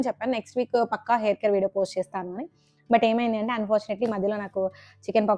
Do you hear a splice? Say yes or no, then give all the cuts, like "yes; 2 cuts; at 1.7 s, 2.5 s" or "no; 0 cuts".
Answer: no; 0 cuts